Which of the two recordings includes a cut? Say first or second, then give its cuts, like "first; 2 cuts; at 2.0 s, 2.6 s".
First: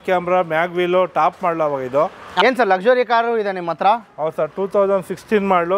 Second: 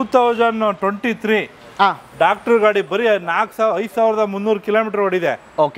first; 1 cut; at 2.4 s